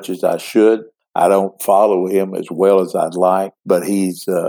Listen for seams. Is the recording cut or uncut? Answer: cut